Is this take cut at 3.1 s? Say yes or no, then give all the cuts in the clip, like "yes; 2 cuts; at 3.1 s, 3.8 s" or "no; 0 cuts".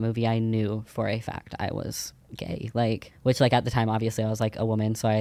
yes; 1 cut; at 3.1 s